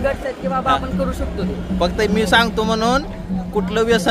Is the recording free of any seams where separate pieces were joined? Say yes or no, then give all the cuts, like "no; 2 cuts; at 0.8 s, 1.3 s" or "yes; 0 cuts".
yes; 0 cuts